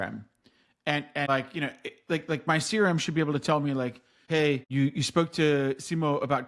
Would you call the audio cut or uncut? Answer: cut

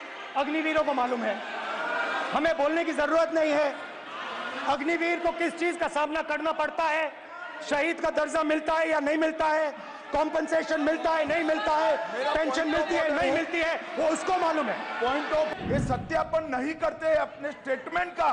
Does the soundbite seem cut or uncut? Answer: cut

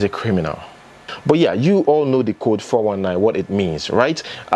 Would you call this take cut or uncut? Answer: cut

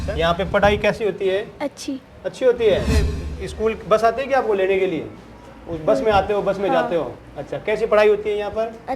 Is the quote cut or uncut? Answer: cut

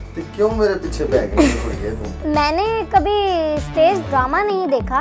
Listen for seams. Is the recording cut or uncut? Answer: cut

